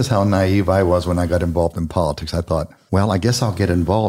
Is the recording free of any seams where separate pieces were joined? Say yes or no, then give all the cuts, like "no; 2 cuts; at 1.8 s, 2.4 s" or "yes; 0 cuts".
no; 1 cut; at 2.8 s